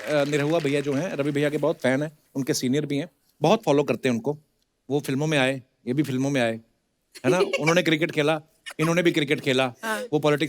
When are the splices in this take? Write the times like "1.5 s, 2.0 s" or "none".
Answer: none